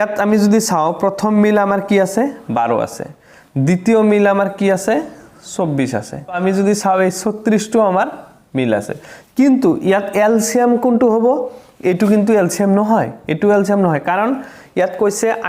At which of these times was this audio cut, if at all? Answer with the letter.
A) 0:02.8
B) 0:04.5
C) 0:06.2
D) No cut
C